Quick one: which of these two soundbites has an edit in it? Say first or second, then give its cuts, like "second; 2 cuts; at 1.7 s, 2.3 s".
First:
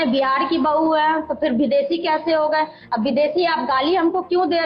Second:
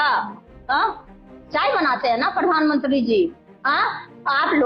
second; 1 cut; at 1.1 s